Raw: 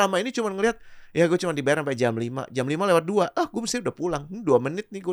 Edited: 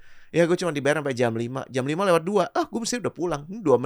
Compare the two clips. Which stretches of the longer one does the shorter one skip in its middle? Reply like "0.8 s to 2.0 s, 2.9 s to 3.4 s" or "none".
none

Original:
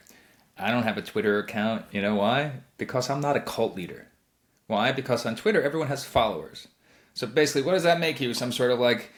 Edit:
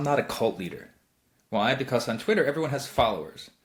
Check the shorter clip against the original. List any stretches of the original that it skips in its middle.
none

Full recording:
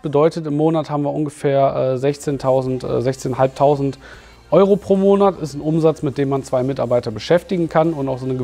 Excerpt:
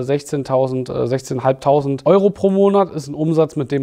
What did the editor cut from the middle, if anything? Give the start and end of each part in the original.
3.9 s to 4.4 s

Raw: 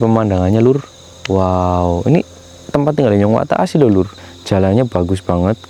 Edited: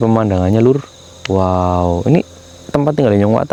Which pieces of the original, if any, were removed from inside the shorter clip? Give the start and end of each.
none

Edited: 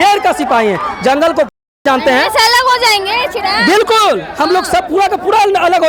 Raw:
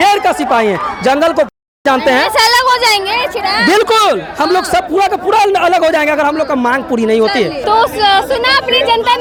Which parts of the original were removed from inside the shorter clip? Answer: none

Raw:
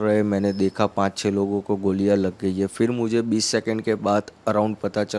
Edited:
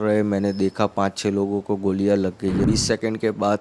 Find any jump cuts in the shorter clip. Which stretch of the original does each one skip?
2.6 s to 3.3 s

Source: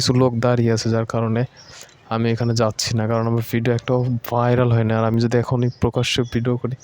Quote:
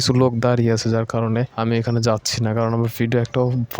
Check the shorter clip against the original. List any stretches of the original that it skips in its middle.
1.5 s to 2.0 s

